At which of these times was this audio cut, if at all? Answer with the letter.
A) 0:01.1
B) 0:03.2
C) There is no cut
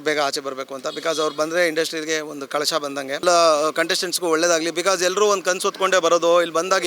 B